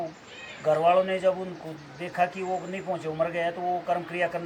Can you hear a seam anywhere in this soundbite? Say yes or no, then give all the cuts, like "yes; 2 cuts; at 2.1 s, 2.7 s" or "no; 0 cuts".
no; 0 cuts